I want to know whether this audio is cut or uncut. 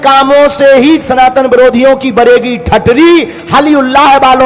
uncut